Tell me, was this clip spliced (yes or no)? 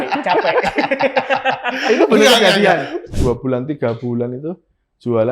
yes